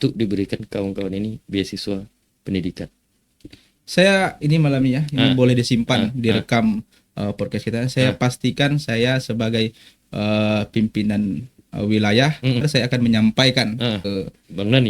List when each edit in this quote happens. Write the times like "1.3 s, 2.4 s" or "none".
12.7 s, 14.1 s